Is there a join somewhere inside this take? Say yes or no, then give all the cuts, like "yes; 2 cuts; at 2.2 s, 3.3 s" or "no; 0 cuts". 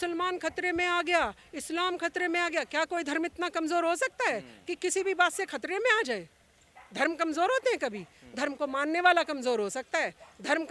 no; 0 cuts